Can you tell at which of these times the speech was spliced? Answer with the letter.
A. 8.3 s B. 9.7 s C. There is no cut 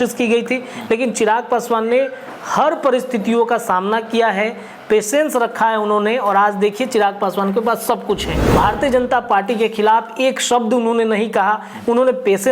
A